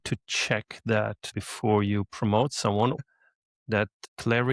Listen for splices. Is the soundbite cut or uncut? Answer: cut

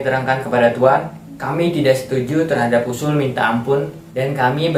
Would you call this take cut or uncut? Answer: uncut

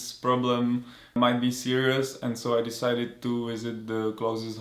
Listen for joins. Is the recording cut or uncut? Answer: uncut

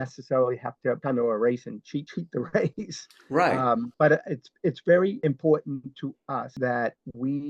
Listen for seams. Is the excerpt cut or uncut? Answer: cut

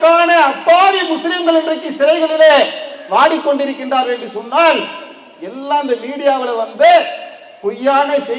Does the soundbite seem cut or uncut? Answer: uncut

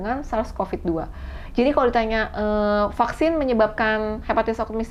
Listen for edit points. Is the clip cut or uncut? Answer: uncut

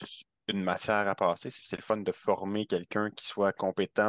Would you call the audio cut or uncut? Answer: uncut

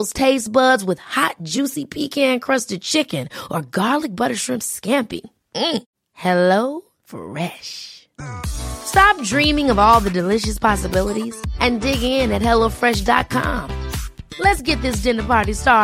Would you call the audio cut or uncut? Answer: uncut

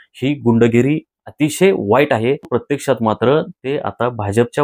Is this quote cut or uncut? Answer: cut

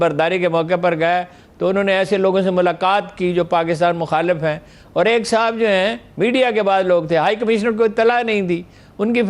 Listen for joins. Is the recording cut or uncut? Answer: uncut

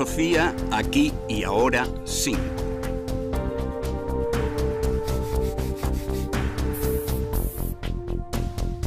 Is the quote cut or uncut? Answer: cut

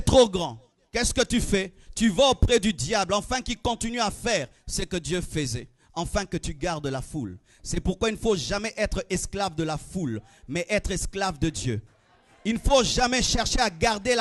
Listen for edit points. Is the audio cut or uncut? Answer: uncut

